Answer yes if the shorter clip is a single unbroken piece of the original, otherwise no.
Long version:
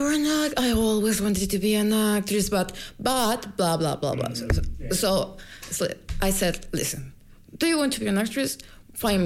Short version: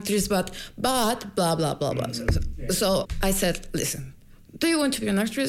no